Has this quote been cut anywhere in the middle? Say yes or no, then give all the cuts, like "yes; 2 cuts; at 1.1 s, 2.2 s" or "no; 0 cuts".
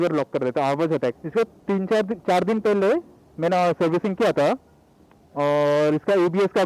yes; 1 cut; at 1.2 s